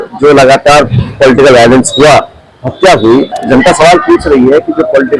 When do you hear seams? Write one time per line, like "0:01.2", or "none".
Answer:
0:03.3